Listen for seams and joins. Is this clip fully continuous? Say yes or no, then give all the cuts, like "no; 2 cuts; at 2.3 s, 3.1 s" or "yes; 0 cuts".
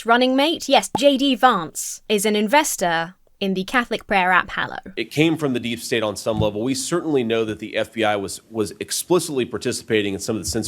no; 1 cut; at 4.9 s